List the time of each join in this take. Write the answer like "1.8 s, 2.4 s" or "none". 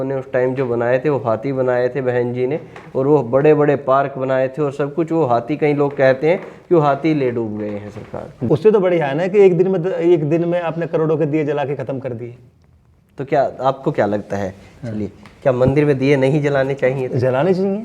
8.4 s